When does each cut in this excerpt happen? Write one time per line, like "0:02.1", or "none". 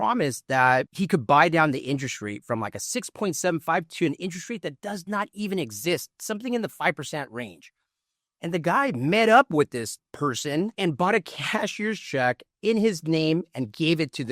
0:10.7